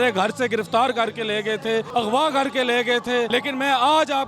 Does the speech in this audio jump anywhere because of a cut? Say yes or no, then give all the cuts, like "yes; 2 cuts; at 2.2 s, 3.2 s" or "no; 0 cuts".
yes; 2 cuts; at 1.9 s, 3.3 s